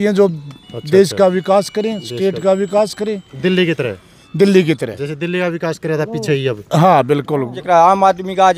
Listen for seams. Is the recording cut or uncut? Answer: cut